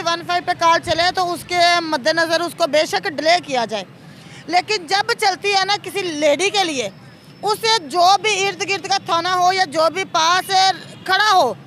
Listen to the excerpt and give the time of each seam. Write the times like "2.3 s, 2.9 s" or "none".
none

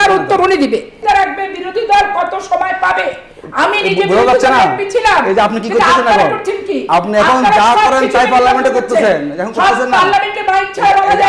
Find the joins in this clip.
0.9 s

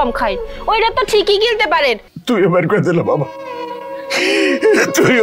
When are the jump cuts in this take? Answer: 2.1 s

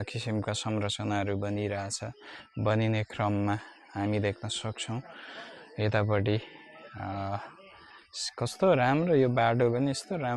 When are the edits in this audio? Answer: none

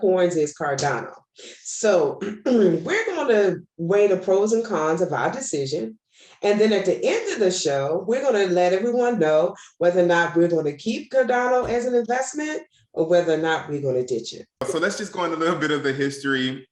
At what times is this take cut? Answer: 14.6 s

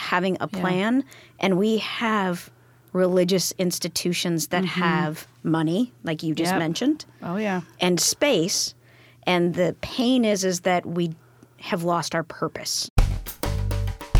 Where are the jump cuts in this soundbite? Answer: 12.9 s

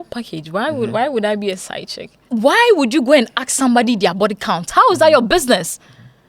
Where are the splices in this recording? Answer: 2.2 s

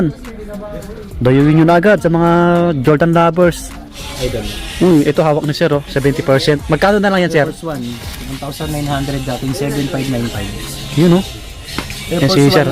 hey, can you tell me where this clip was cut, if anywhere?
4.0 s

